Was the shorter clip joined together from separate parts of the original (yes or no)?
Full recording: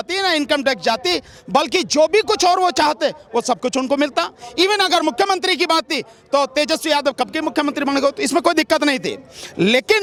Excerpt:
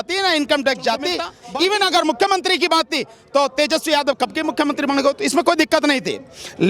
yes